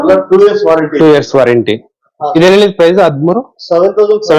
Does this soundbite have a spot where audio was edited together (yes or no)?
no